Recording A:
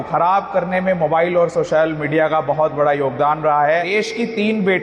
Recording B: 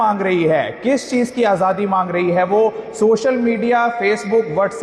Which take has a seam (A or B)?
A